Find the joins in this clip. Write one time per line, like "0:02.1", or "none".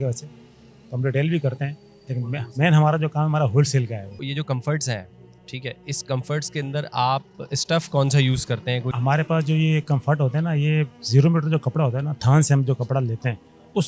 0:04.2
0:08.9